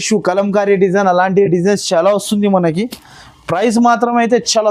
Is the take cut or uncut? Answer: uncut